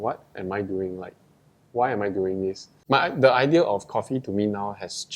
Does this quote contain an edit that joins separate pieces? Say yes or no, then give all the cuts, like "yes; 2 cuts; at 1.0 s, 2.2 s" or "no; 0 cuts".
yes; 1 cut; at 2.7 s